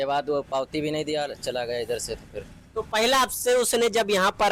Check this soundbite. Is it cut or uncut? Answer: uncut